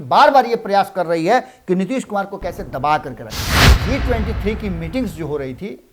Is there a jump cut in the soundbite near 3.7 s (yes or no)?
yes